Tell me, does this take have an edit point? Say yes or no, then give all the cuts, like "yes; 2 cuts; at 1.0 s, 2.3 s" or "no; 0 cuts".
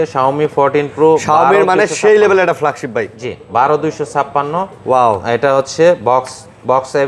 no; 0 cuts